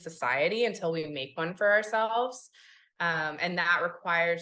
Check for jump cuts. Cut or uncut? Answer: uncut